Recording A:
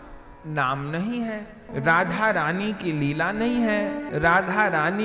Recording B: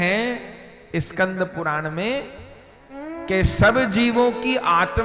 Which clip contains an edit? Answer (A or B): A